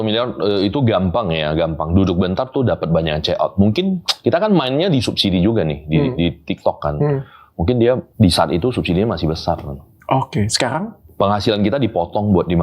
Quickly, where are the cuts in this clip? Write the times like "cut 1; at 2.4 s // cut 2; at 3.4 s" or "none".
cut 1; at 8.1 s // cut 2; at 11.0 s